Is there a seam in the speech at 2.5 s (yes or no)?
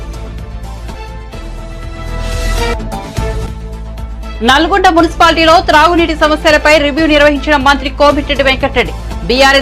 no